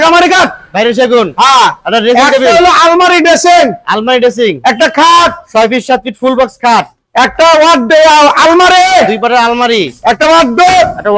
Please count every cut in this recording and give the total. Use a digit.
0